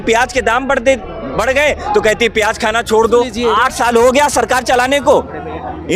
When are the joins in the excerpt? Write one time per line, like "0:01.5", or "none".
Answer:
0:03.4

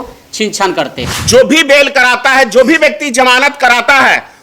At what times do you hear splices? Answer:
0:01.0

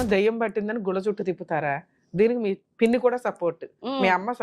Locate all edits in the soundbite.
0:02.6

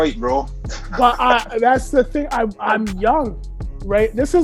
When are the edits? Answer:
0:02.6

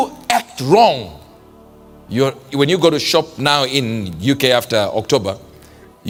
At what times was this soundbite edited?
none

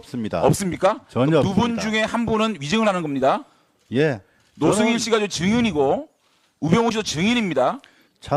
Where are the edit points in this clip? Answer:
0:07.3

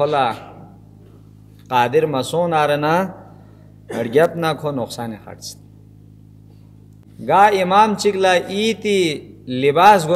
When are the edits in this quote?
0:07.1

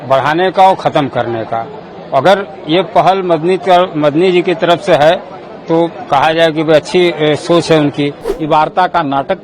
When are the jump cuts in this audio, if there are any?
0:08.3

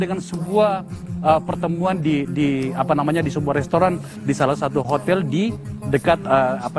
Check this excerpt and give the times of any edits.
none

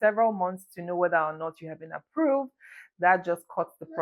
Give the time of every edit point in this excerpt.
none

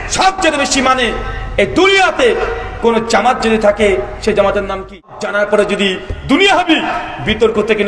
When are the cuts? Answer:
0:05.2

